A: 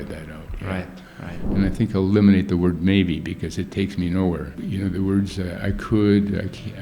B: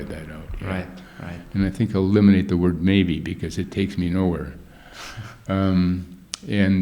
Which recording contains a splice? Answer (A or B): A